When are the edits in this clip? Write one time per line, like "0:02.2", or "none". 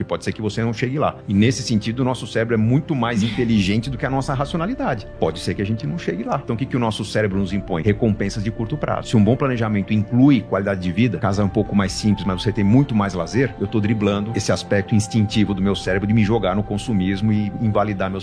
0:01.2
0:06.4
0:07.8
0:09.0
0:11.2
0:13.5
0:14.3